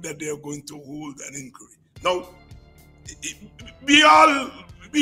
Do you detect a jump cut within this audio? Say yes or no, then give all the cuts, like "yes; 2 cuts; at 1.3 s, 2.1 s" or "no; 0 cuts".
no; 0 cuts